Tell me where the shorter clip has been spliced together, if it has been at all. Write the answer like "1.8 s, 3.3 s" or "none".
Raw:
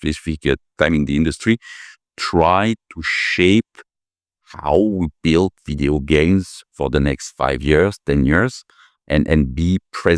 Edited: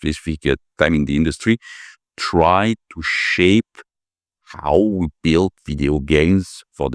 none